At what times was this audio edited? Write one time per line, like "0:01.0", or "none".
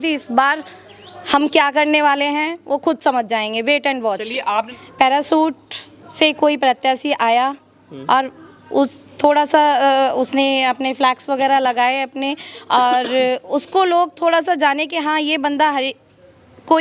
0:04.7